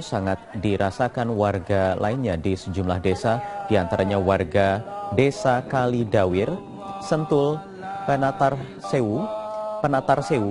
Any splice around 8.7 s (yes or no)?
yes